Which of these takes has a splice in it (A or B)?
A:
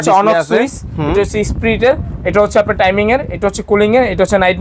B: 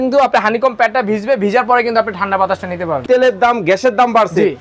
B